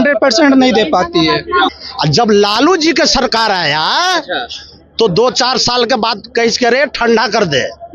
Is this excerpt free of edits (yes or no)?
no